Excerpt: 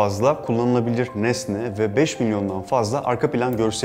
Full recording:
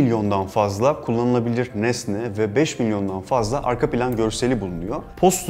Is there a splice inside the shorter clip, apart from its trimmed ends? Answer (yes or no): no